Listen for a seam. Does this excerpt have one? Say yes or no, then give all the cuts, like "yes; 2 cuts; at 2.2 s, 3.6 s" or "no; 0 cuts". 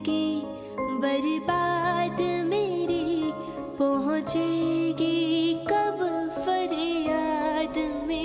no; 0 cuts